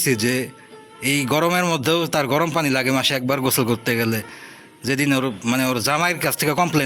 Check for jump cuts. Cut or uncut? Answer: uncut